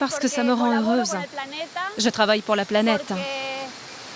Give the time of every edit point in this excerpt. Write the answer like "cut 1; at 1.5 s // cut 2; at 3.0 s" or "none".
cut 1; at 3.2 s

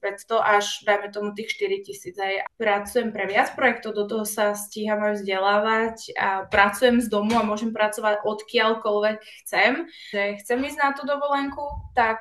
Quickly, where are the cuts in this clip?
cut 1; at 2.4 s // cut 2; at 10.1 s

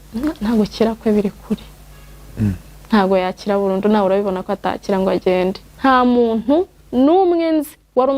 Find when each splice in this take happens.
cut 1; at 5.7 s

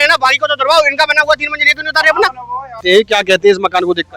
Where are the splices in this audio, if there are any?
cut 1; at 2.8 s

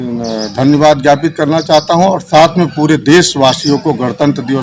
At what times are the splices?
none

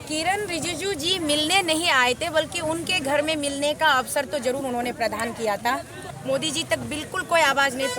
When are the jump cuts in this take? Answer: cut 1; at 6.0 s

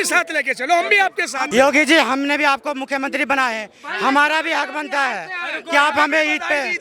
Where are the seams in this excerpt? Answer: cut 1; at 1.5 s

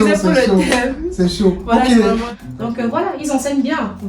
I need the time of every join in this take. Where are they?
cut 1; at 2.3 s

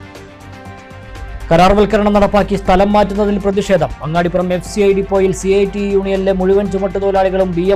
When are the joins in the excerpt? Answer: cut 1; at 1.0 s

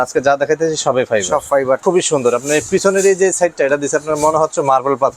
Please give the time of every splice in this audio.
cut 1; at 1.8 s

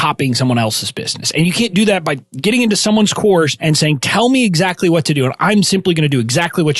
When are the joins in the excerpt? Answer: cut 1; at 2.2 s // cut 2; at 3.6 s

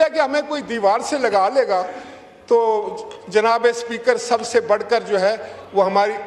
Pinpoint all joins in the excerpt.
none

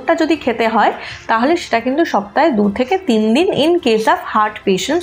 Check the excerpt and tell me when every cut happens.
none

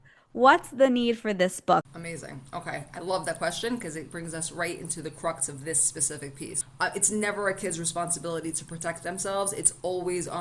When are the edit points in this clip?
cut 1; at 1.9 s // cut 2; at 6.6 s

